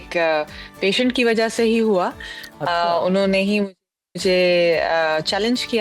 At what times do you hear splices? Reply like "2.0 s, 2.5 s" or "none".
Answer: none